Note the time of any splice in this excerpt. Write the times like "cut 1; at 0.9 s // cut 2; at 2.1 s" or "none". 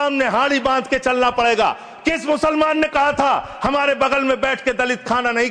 none